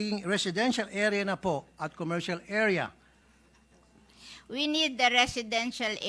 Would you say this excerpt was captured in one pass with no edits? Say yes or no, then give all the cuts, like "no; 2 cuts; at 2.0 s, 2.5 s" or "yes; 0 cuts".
yes; 0 cuts